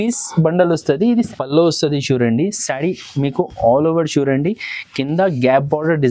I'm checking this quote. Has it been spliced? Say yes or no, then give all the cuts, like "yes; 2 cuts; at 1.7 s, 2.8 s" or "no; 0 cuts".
yes; 1 cut; at 1.3 s